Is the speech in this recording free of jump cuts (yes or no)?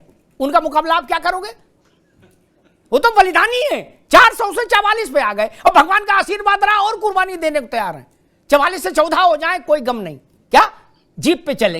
no